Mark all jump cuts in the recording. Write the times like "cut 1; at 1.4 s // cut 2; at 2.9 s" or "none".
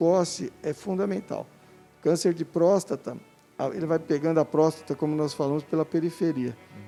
none